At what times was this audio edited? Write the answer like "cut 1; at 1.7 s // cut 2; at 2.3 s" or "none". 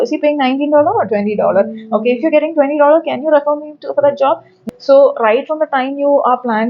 cut 1; at 4.5 s